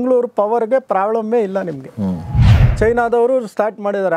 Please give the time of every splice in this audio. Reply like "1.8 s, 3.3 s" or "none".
2.7 s